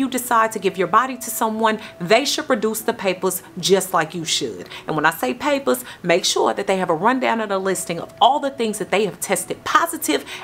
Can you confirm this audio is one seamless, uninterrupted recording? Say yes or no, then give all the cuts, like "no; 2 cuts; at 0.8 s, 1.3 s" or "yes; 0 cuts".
yes; 0 cuts